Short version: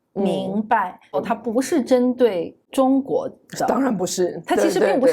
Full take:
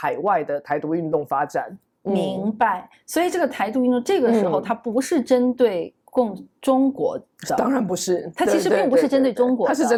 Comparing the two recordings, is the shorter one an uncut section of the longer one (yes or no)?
no